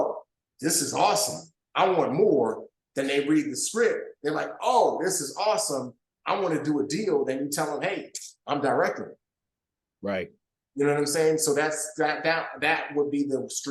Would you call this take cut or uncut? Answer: uncut